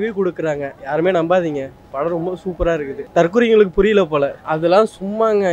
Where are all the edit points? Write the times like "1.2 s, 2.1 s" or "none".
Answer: 3.0 s, 4.4 s